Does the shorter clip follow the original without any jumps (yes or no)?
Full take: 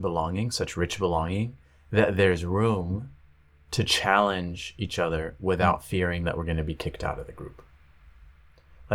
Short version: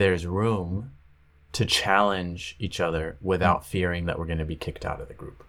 yes